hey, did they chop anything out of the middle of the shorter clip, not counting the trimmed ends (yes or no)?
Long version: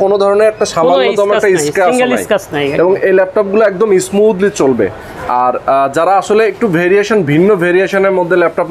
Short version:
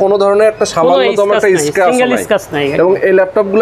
no